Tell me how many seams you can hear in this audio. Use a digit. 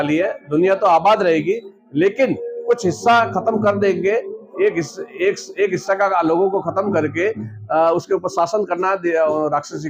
0